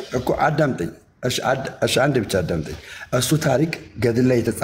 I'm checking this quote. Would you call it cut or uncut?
uncut